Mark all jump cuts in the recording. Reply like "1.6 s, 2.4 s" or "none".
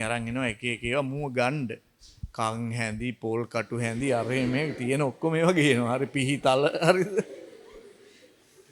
none